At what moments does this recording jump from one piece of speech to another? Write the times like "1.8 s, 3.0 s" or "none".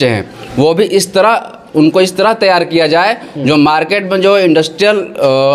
none